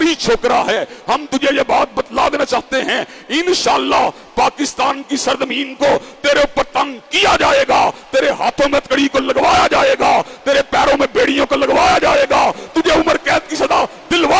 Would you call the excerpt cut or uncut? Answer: uncut